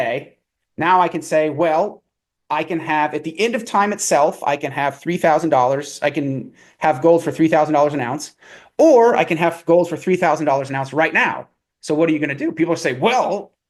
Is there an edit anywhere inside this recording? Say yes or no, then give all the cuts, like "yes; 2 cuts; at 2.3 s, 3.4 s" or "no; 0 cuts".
no; 0 cuts